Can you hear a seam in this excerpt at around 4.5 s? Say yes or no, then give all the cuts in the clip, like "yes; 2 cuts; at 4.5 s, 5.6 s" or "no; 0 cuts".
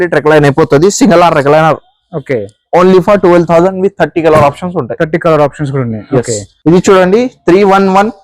no; 1 cut; at 6.5 s